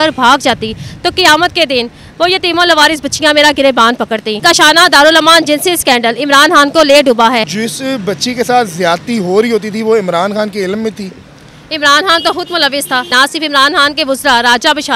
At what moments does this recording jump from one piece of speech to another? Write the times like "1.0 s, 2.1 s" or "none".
4.4 s, 7.5 s, 13.1 s

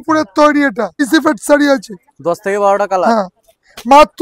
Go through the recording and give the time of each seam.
1.0 s

